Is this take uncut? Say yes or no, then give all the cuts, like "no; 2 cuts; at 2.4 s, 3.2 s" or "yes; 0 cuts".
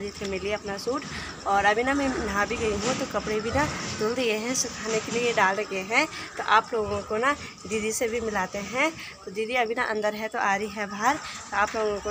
yes; 0 cuts